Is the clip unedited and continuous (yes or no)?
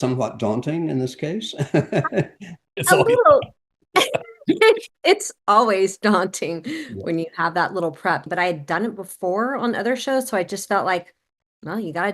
no